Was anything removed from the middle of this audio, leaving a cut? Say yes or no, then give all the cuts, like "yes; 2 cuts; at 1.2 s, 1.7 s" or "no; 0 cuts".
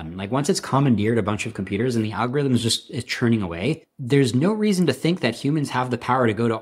yes; 1 cut; at 3.9 s